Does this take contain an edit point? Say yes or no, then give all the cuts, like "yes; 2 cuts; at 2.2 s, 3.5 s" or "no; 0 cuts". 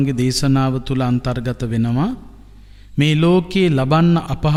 no; 0 cuts